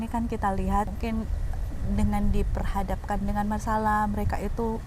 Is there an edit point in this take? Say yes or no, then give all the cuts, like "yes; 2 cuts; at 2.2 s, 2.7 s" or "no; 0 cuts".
yes; 1 cut; at 0.9 s